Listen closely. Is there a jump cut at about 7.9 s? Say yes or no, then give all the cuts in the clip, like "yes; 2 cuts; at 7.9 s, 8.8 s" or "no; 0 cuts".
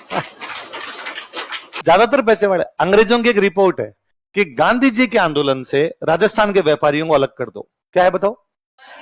no; 1 cut; at 1.7 s